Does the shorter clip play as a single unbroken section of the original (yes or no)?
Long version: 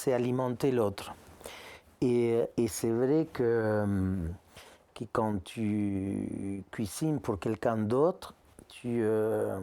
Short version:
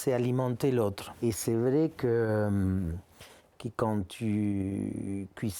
no